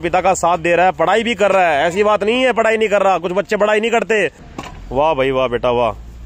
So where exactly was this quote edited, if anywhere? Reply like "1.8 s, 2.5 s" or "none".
4.5 s